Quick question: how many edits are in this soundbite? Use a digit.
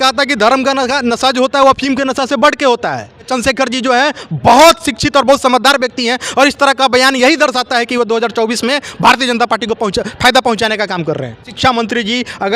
2